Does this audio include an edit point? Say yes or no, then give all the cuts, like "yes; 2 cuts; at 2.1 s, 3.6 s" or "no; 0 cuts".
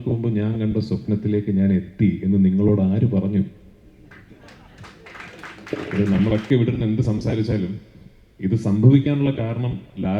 yes; 1 cut; at 5.9 s